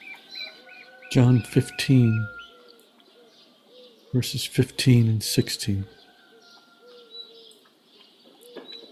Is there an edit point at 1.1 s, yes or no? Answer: yes